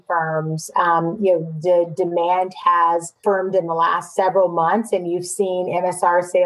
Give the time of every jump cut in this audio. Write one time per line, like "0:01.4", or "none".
0:03.1
0:04.1